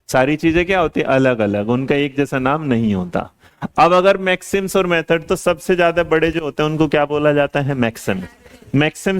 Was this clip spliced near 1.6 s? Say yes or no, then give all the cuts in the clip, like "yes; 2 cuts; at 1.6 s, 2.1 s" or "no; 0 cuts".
no; 0 cuts